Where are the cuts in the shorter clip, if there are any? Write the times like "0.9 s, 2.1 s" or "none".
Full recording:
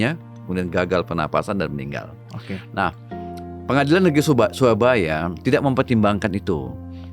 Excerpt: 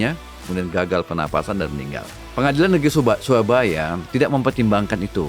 2.2 s